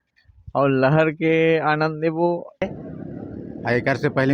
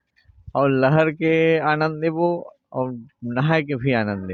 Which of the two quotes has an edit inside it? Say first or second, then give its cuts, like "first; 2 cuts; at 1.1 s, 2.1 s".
first; 1 cut; at 2.6 s